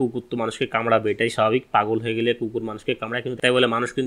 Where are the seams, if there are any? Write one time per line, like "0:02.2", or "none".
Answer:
none